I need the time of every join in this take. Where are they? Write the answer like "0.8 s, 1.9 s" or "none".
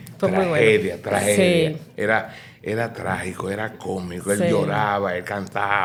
none